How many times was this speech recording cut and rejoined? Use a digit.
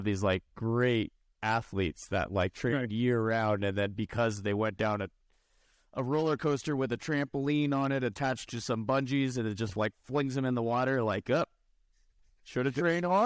0